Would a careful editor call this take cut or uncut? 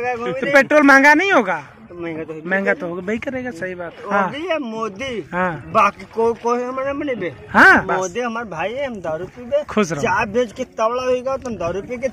cut